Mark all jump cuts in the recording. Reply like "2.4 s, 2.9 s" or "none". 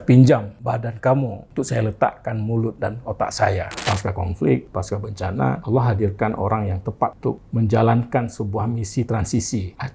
3.8 s, 7.4 s